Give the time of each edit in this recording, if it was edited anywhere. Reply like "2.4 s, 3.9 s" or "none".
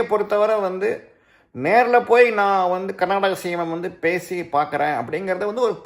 none